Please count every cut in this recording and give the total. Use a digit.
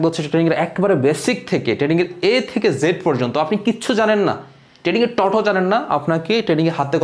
0